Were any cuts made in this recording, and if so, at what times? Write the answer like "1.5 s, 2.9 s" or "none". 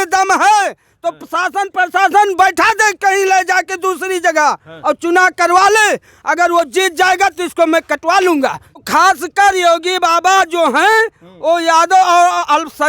8.8 s